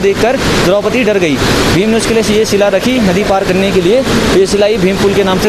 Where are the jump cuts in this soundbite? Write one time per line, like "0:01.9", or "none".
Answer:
none